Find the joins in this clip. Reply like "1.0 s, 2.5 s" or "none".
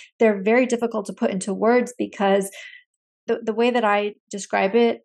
3.2 s